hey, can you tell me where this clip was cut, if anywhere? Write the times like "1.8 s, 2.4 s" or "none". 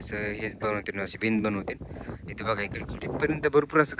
3.1 s